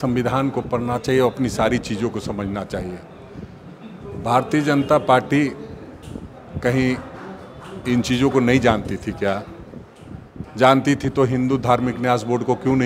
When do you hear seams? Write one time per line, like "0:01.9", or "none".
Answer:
none